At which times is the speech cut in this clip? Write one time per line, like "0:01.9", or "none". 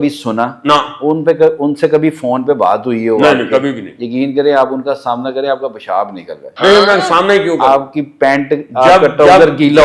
none